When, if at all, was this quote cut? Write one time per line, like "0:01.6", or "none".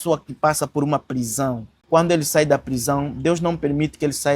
0:01.7